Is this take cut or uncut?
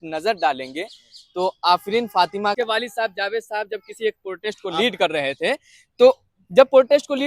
cut